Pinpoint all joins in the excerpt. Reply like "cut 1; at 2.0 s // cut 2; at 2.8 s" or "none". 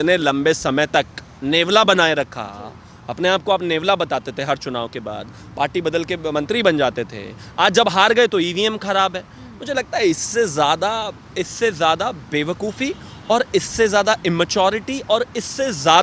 none